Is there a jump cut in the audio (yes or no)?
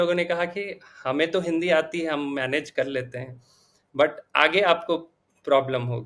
no